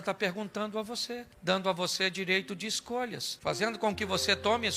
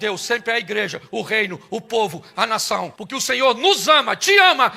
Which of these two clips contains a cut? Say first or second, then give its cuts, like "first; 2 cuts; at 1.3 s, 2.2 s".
second; 1 cut; at 3.0 s